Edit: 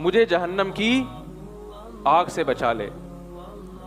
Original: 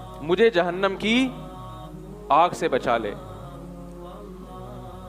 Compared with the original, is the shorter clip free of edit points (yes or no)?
no